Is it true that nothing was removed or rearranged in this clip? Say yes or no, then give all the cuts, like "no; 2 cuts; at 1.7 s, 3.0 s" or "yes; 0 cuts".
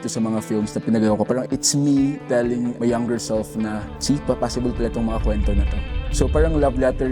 no; 3 cuts; at 1.4 s, 2.8 s, 3.9 s